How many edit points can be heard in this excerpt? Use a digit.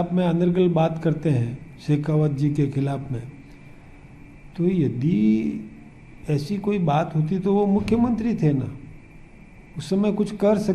0